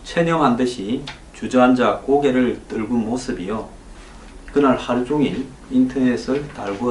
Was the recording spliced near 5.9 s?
yes; 1 cut; at 5.9 s

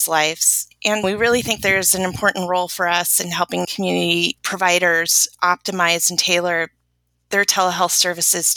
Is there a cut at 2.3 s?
no; 1 cut; at 1.0 s

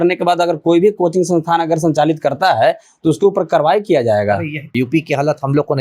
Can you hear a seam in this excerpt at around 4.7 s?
yes; 1 cut; at 4.7 s

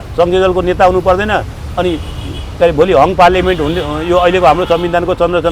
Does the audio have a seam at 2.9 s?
no; 0 cuts

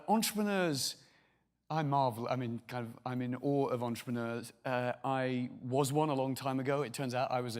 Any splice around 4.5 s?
no; 1 cut; at 2.9 s

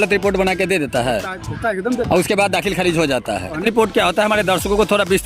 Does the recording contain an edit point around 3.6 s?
yes; 1 cut; at 3.6 s

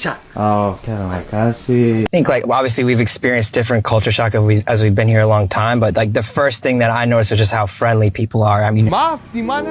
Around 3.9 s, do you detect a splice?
no; 2 cuts; at 2.1 s, 8.9 s

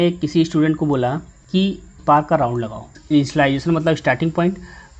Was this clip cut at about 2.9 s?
yes; 1 cut; at 2.9 s

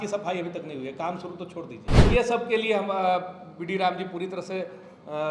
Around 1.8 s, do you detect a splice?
yes; 1 cut; at 1.8 s

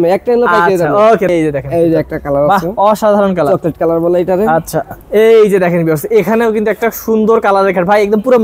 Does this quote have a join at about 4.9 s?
yes; 2 cuts; at 1.3 s, 4.9 s

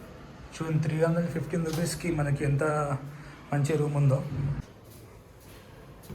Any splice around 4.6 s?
yes; 1 cut; at 4.6 s

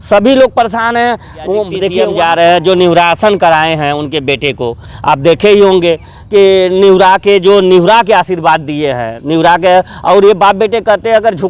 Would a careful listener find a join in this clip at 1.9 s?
yes; 1 cut; at 1.9 s

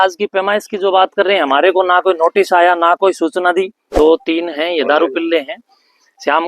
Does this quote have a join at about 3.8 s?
yes; 1 cut; at 3.8 s

